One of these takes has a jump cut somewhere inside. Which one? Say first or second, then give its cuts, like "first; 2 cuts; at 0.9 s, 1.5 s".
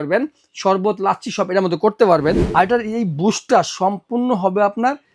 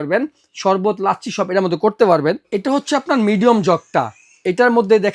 first; 1 cut; at 2.4 s